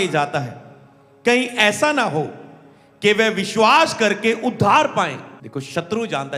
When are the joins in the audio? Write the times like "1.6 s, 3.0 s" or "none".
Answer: 5.3 s